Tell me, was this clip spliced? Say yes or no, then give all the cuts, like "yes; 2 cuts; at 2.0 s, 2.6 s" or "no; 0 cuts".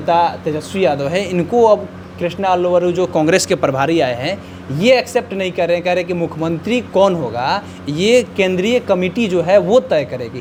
no; 0 cuts